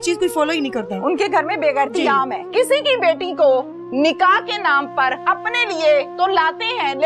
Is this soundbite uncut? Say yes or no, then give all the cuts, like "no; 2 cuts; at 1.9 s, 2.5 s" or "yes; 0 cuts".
no; 2 cuts; at 2.5 s, 5.2 s